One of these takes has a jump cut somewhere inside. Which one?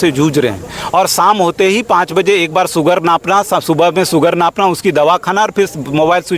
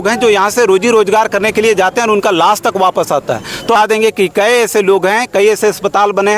second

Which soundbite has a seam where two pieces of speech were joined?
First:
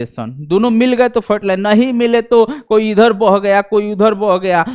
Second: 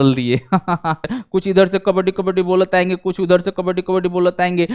second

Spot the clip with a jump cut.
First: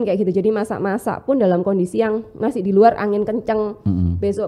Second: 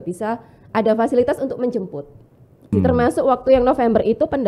second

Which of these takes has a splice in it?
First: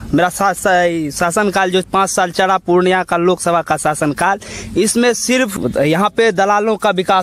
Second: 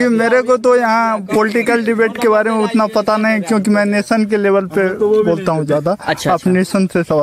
first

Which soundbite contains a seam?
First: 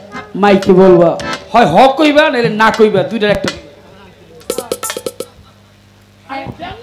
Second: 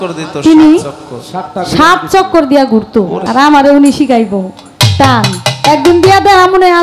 second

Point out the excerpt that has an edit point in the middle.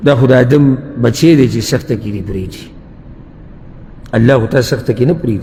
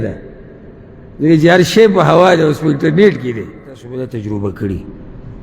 second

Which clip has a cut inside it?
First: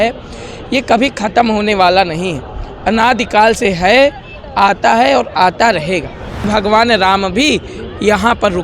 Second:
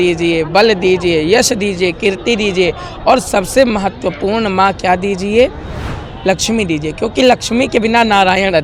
first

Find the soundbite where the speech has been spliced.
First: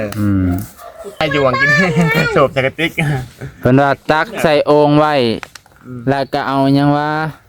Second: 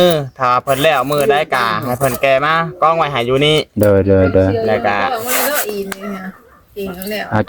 first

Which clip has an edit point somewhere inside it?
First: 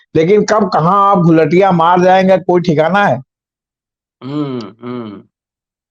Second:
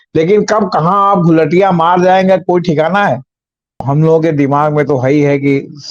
second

